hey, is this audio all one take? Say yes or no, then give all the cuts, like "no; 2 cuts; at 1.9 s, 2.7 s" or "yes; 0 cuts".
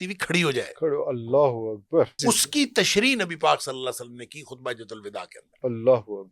no; 1 cut; at 2.2 s